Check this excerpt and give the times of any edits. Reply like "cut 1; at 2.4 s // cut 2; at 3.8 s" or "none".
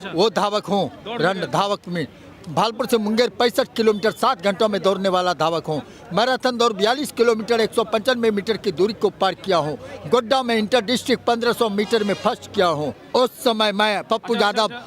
cut 1; at 12.9 s